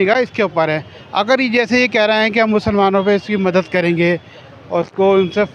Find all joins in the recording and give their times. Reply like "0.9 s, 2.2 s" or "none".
none